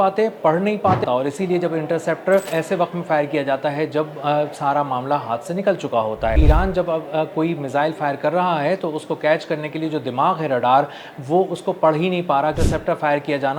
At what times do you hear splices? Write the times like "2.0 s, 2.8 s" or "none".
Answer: 1.0 s, 2.5 s, 6.4 s, 12.6 s